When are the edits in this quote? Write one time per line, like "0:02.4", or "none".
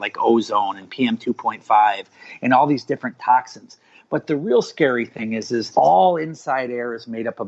none